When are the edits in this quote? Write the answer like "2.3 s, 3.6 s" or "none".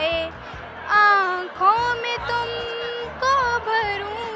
none

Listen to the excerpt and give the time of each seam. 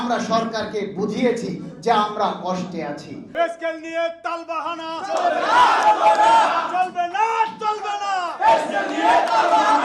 3.3 s

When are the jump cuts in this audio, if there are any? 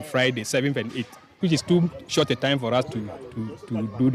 1.4 s

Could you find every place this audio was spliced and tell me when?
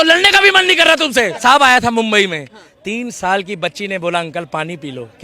1.4 s

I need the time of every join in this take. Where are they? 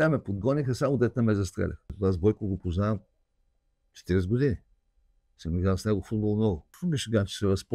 1.9 s, 6.7 s

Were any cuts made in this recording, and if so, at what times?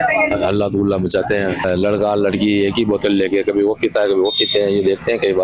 1.6 s

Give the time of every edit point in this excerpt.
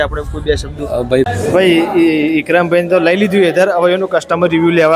1.3 s

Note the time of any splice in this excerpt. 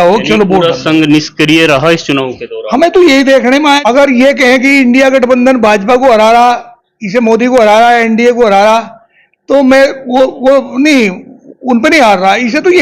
3.8 s

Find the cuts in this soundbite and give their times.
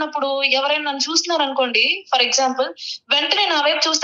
none

